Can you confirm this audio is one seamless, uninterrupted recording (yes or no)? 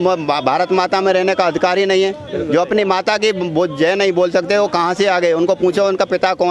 yes